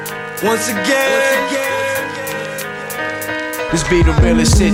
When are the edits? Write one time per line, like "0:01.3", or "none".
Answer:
none